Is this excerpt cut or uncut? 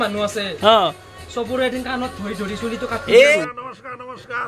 cut